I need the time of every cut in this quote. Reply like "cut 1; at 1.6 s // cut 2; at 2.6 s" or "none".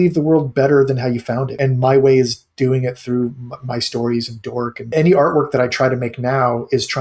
cut 1; at 1.5 s // cut 2; at 4.9 s